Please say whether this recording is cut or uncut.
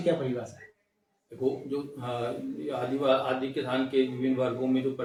uncut